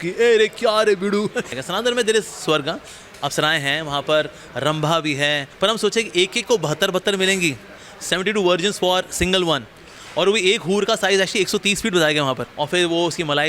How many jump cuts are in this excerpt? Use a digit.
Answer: 3